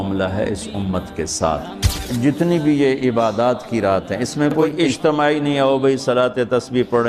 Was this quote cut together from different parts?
yes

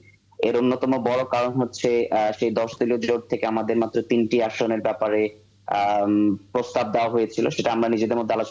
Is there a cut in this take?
no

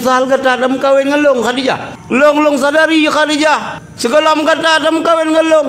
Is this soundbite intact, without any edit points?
no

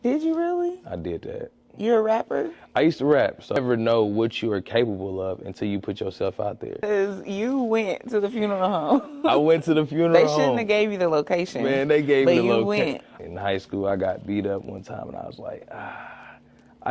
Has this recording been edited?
yes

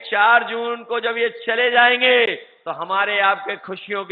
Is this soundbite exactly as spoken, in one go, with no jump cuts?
yes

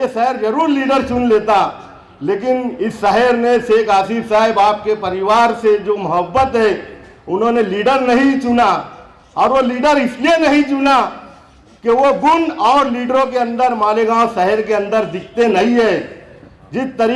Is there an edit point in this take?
no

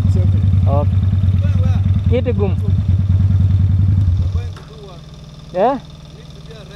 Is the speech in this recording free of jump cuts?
yes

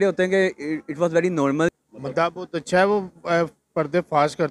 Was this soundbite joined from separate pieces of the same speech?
yes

